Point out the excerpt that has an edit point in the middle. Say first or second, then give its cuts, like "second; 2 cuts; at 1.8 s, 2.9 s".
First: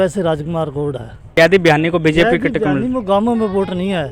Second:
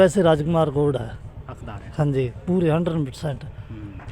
first; 1 cut; at 1.3 s